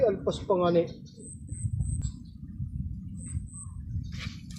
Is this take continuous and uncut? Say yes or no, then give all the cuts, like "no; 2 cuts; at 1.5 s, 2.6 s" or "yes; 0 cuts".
no; 1 cut; at 2.0 s